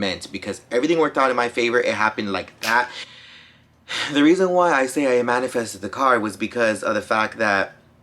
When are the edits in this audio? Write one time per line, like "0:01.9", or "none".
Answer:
0:03.0